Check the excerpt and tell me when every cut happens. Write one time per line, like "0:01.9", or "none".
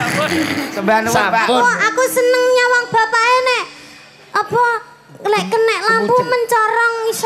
none